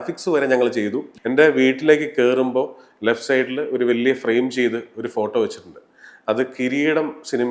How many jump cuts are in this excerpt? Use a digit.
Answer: 1